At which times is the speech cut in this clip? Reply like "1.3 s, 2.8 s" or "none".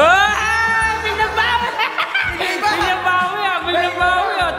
none